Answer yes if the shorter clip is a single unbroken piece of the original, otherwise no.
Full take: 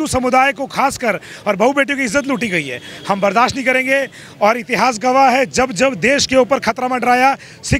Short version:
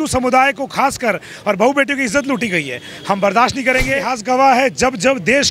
no